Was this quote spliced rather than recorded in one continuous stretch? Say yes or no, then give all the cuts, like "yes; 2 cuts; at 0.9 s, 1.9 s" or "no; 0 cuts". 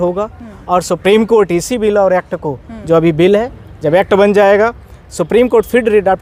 no; 0 cuts